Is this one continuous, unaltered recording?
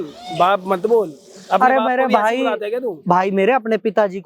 yes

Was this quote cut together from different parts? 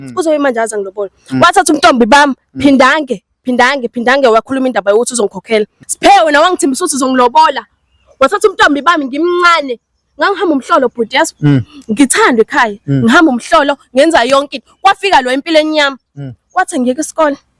yes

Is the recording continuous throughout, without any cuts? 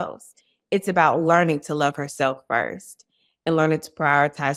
yes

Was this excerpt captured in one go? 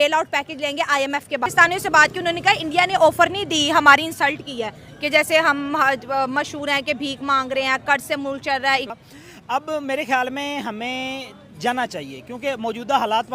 no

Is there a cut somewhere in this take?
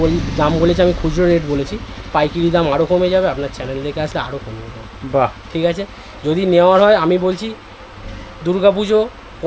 no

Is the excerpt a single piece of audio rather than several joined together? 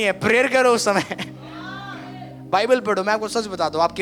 yes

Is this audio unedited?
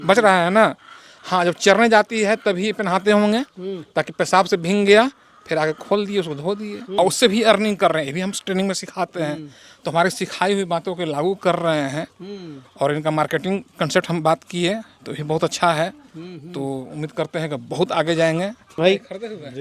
no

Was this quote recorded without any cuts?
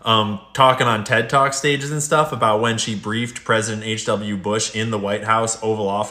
yes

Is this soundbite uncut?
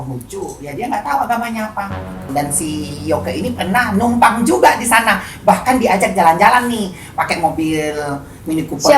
no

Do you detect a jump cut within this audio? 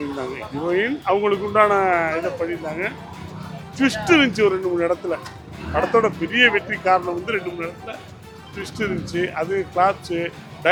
no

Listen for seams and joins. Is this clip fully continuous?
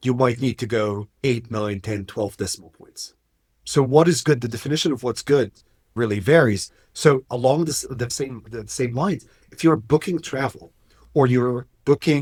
yes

